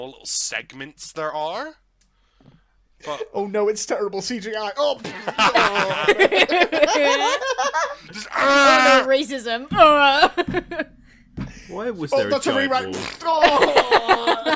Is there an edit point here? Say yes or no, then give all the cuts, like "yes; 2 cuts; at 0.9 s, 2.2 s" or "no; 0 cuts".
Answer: no; 0 cuts